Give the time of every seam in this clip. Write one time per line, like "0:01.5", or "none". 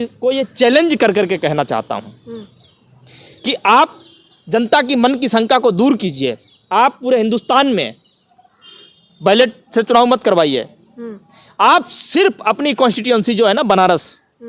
none

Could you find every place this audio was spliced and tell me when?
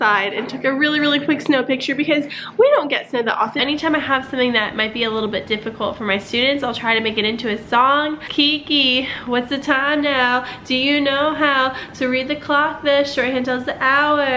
0:03.6
0:08.3

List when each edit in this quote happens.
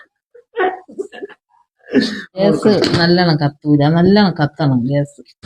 0:02.4

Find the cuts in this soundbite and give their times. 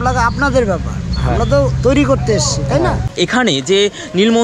0:03.1

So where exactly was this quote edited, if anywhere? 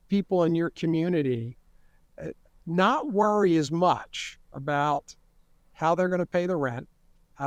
none

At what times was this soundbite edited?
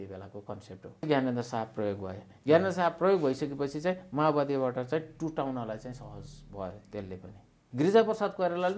0:01.0
0:07.6

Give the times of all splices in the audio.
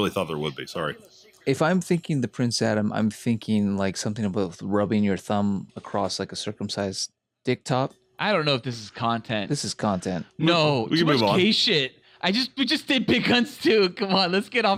none

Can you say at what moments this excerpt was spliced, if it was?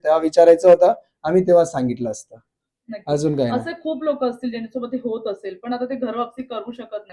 none

